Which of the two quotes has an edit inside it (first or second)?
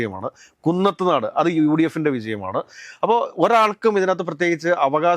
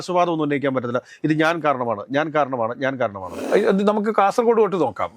second